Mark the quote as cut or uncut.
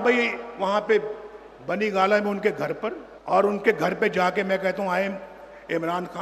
cut